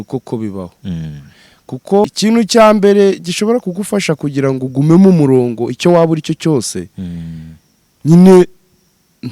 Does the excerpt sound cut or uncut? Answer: cut